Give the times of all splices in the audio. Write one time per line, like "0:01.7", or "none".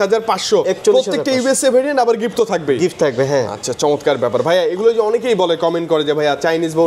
none

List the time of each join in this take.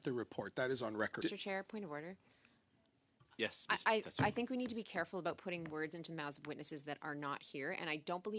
0:01.2

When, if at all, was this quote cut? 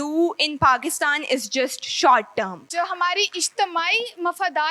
0:02.6

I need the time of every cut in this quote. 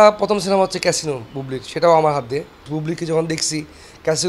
0:02.7

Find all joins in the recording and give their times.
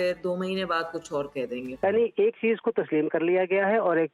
0:01.6

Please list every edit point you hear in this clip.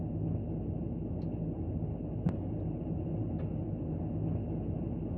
0:02.2

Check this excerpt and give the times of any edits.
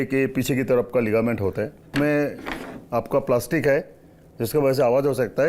0:01.9

